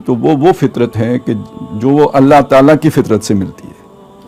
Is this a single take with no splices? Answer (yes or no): yes